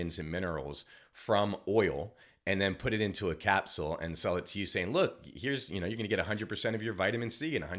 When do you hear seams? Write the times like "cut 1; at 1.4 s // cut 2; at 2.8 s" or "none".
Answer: none

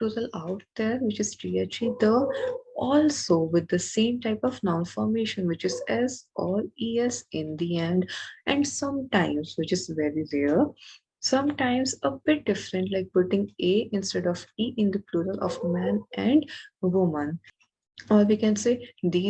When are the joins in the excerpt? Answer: cut 1; at 17.5 s

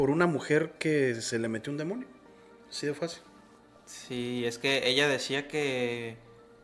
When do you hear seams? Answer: none

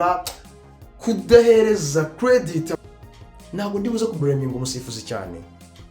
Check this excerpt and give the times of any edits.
cut 1; at 2.7 s

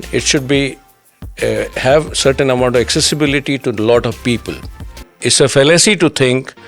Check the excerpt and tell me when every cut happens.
cut 1; at 5.1 s

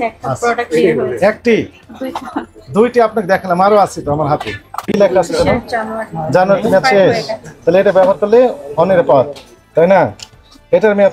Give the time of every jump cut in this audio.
cut 1; at 4.9 s

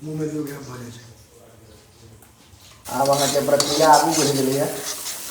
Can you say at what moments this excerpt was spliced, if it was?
cut 1; at 2.8 s

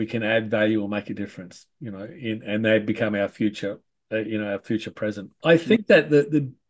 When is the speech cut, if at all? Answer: cut 1; at 5.3 s

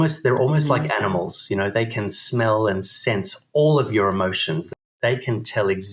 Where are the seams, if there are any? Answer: cut 1; at 4.9 s

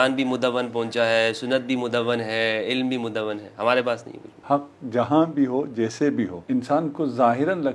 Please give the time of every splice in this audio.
cut 1; at 4.4 s // cut 2; at 6.4 s

